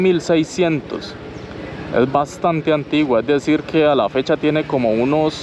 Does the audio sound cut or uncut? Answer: uncut